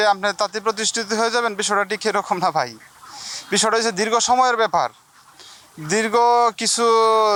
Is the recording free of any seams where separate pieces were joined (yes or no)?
yes